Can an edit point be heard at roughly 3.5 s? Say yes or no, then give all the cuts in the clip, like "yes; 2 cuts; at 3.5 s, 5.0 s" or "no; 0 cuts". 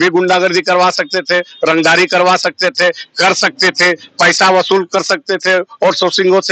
no; 0 cuts